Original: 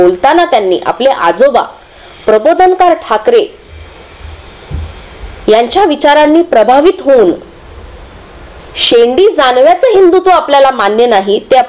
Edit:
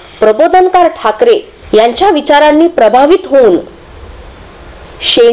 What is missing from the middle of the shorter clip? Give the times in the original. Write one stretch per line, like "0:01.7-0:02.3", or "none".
0:03.6-0:05.3